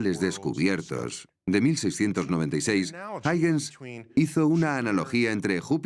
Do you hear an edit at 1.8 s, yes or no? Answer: yes